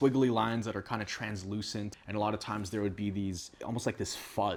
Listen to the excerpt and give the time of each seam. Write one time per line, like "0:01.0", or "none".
none